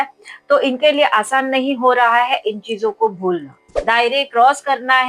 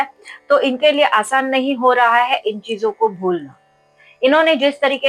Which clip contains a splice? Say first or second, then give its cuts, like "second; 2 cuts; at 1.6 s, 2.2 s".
first; 1 cut; at 3.7 s